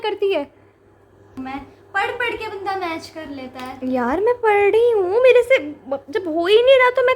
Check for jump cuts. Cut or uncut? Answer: cut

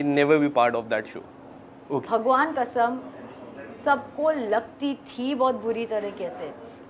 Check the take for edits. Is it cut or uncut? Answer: cut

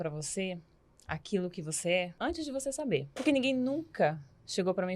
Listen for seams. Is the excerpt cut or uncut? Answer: cut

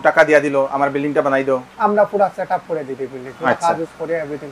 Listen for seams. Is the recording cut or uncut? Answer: uncut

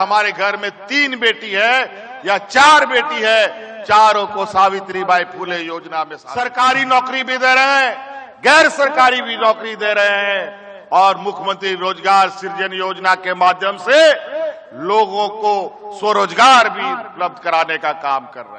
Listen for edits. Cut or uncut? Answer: cut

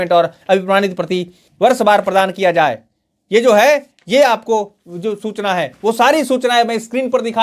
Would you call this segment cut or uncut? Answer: cut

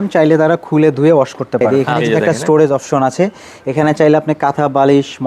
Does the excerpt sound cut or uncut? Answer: cut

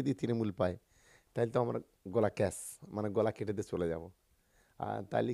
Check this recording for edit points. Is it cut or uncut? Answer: uncut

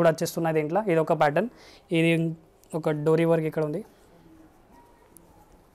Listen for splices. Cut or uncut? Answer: uncut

